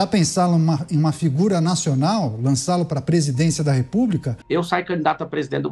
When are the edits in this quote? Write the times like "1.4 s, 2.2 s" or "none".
4.3 s